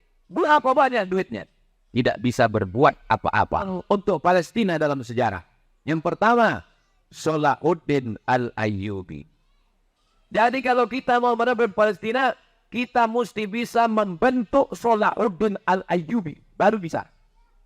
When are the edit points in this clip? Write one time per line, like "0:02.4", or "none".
0:03.8